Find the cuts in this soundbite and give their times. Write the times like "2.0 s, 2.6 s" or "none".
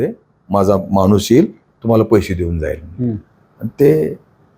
none